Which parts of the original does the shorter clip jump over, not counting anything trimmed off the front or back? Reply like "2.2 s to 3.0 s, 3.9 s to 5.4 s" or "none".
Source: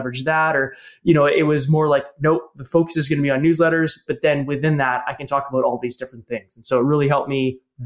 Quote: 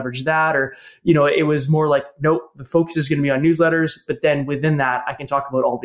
none